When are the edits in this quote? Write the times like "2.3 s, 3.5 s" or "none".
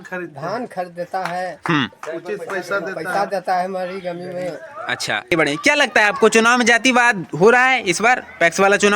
5.3 s